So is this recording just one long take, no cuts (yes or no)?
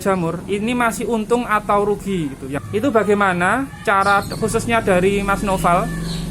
no